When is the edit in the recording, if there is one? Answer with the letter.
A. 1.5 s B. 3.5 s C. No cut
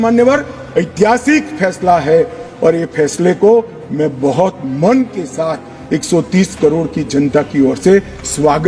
C